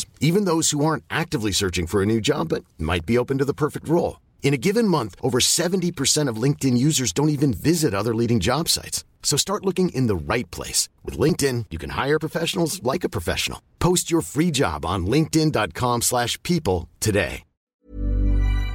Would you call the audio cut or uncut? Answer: cut